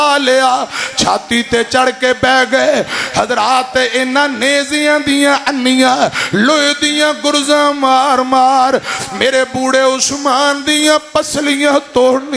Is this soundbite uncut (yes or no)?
yes